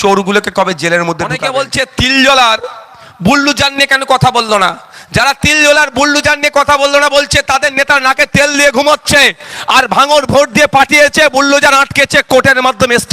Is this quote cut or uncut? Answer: cut